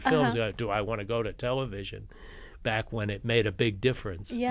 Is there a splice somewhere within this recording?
no; 0 cuts

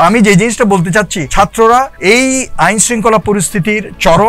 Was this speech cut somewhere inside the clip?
yes; 2 cuts; at 1.2 s, 1.9 s

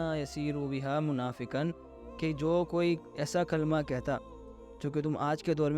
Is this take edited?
no; 0 cuts

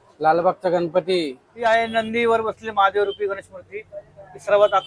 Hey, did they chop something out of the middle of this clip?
yes; 1 cut; at 1.4 s

